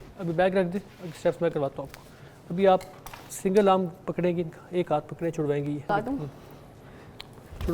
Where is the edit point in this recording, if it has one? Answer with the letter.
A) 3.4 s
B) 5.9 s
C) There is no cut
B